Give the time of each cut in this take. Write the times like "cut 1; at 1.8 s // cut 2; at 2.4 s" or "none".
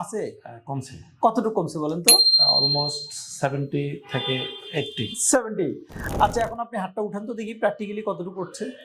cut 1; at 6.0 s